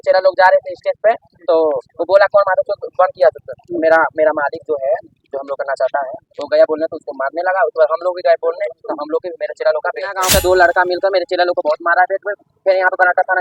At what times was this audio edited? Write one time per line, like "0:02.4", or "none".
0:10.2